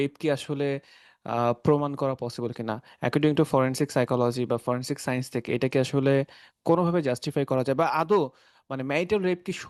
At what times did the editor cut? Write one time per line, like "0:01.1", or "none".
none